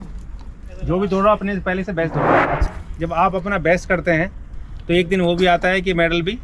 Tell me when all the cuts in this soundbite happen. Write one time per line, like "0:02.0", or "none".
0:02.6

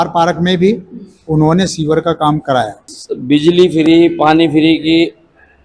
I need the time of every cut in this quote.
0:02.9

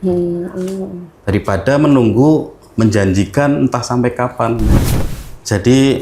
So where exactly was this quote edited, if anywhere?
0:04.8

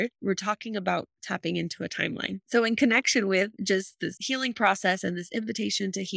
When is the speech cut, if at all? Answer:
0:02.4

